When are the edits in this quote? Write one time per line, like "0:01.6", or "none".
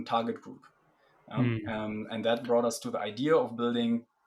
none